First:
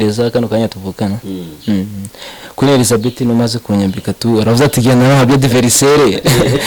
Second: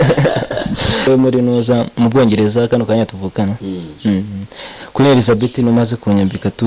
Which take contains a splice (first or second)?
second